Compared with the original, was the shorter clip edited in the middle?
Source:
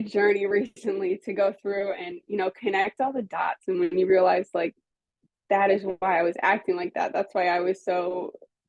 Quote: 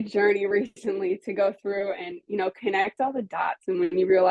no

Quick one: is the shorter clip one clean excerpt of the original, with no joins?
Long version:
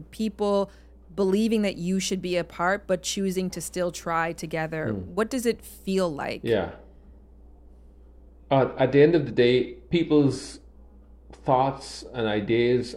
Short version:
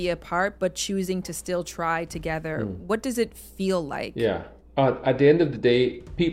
no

